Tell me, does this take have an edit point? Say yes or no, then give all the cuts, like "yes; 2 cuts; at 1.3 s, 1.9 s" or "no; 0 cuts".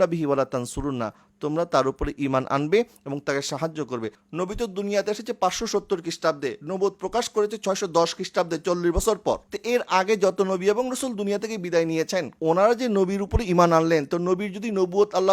yes; 3 cuts; at 4.2 s, 9.5 s, 12.3 s